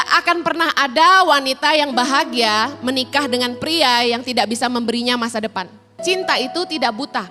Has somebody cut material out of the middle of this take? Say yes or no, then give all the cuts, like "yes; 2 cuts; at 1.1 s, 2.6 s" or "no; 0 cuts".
yes; 1 cut; at 6.0 s